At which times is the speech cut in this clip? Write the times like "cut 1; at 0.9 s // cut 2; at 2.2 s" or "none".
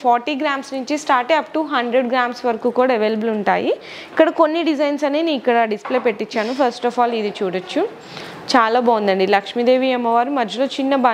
none